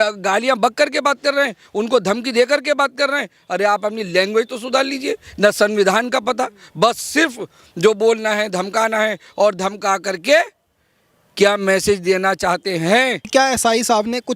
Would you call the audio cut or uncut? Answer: cut